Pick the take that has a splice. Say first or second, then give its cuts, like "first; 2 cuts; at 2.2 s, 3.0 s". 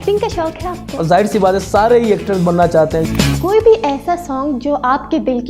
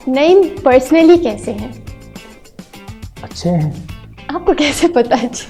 first; 2 cuts; at 1.0 s, 3.1 s